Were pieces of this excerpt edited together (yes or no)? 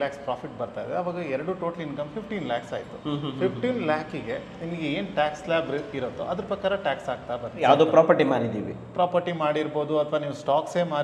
yes